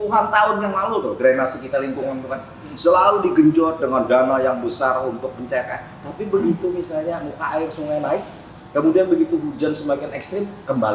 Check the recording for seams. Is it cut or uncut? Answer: uncut